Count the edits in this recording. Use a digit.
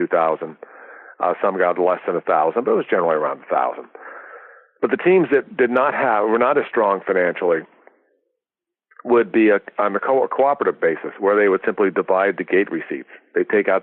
0